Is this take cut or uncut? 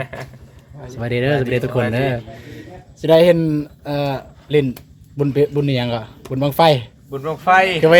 uncut